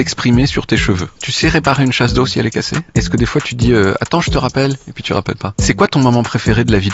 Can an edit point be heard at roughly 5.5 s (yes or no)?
yes